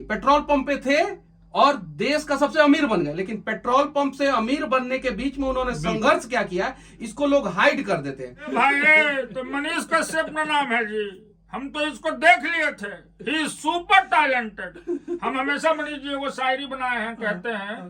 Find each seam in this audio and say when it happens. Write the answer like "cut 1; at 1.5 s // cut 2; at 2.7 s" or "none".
cut 1; at 8.5 s

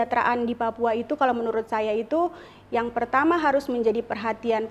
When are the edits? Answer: none

